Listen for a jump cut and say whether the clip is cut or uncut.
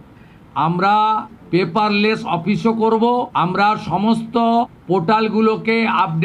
cut